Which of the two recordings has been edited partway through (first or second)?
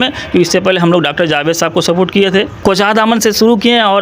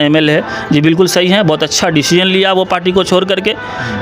first